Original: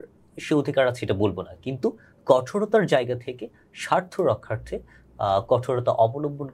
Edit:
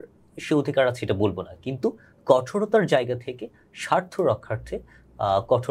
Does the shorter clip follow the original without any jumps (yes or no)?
yes